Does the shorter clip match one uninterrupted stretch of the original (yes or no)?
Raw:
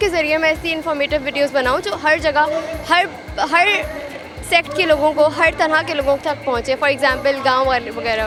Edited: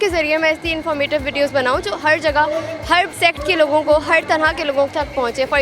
no